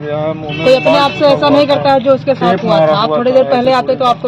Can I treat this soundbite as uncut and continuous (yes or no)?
yes